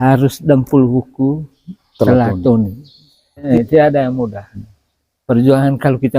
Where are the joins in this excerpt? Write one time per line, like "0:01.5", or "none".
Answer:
0:03.4